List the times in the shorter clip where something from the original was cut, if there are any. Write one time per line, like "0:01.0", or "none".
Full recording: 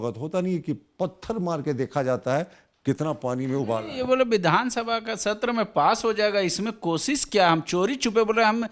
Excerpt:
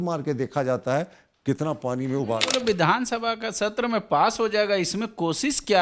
0:02.6